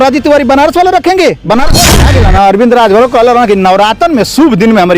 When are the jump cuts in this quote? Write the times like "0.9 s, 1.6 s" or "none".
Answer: 1.8 s